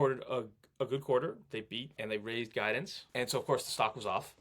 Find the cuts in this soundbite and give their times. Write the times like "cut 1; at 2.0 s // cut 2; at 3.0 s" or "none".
cut 1; at 2.0 s // cut 2; at 3.0 s